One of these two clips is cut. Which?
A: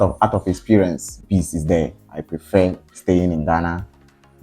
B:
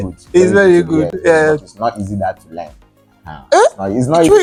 A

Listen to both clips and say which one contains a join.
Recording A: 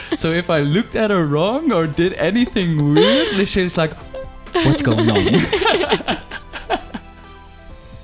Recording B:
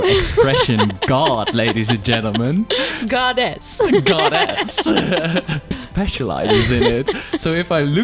B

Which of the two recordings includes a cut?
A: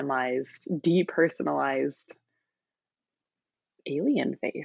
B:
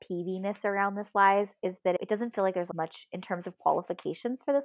B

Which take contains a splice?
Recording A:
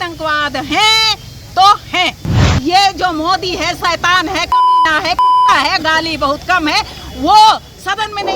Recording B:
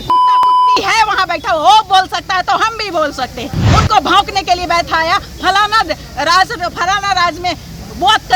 A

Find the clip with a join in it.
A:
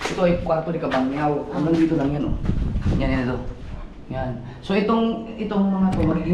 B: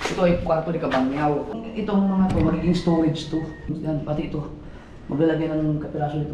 B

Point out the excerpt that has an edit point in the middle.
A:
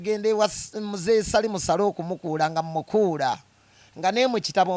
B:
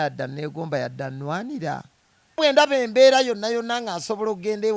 B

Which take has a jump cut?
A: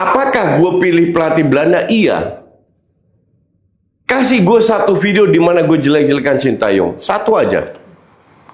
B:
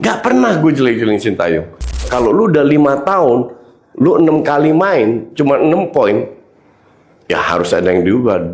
B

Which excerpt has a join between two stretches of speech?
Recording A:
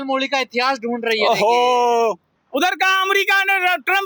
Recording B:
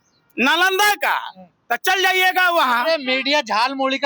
A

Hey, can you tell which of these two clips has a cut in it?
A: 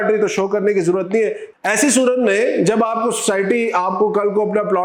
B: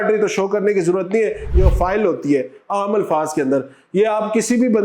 B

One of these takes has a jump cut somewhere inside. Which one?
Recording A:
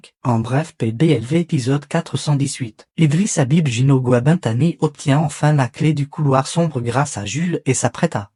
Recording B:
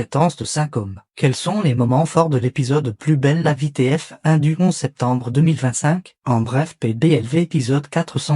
B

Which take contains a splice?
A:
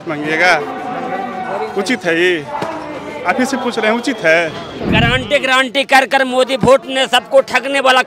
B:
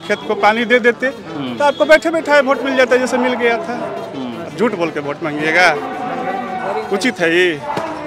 A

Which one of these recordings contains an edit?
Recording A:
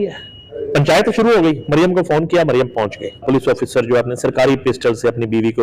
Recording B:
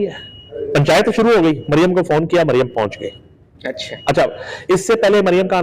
A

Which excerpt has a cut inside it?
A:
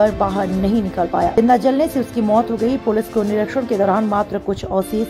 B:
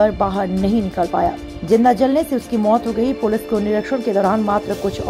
A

